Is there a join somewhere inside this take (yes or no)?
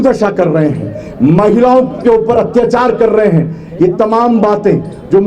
no